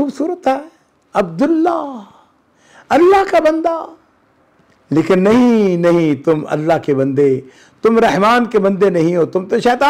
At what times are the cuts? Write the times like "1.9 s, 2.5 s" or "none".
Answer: none